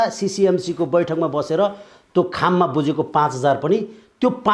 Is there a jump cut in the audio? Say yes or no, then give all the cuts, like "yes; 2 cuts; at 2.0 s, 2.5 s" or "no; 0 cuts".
no; 0 cuts